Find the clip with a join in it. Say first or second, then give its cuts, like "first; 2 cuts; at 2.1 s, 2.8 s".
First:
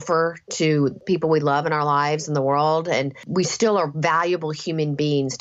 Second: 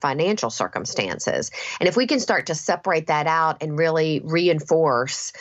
first; 2 cuts; at 1.0 s, 3.2 s